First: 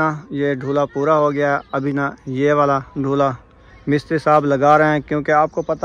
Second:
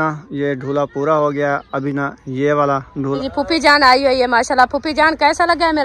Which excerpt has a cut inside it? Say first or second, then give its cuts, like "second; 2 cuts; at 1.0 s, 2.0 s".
second; 1 cut; at 3.2 s